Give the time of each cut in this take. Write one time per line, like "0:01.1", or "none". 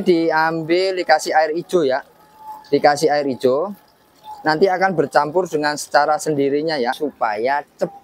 0:07.0

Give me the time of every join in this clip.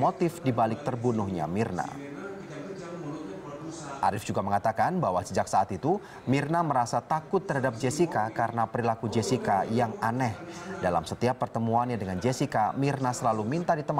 none

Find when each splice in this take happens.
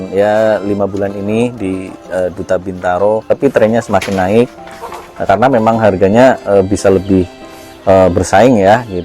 0:03.2

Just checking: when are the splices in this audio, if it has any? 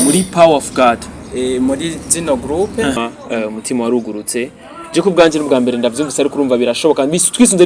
0:03.0

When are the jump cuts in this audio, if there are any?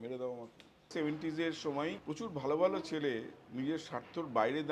0:00.9
0:02.0

